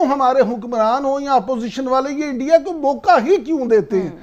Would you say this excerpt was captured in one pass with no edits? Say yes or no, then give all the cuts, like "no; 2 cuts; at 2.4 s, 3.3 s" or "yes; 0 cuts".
yes; 0 cuts